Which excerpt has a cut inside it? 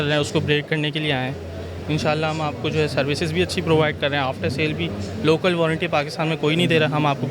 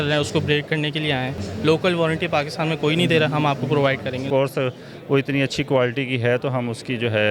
second; 2 cuts; at 1.4 s, 4.2 s

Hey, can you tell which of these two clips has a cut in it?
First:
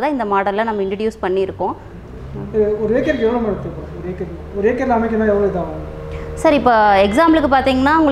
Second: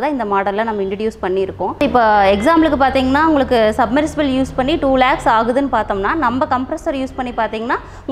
second; 1 cut; at 1.8 s

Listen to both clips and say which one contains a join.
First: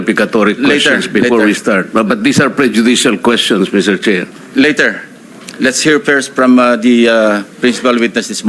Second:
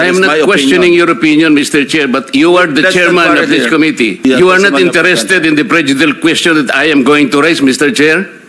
second; 1 cut; at 4.2 s

